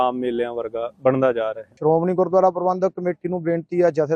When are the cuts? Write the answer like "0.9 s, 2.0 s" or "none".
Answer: 1.6 s